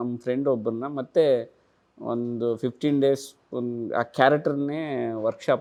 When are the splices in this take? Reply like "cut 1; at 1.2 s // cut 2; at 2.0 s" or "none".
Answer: none